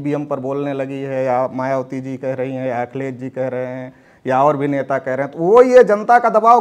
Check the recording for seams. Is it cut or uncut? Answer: uncut